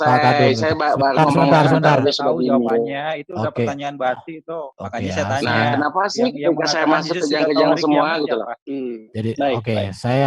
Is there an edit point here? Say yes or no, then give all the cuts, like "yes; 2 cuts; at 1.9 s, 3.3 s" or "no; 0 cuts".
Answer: yes; 1 cut; at 8.6 s